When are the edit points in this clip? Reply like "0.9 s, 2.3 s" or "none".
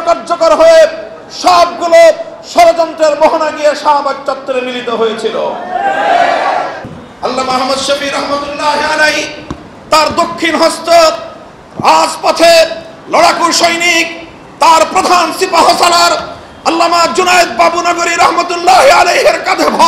6.9 s